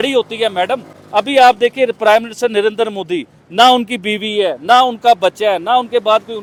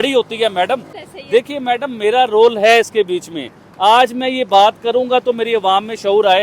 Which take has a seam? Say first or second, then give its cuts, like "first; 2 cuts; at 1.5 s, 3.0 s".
second; 1 cut; at 0.9 s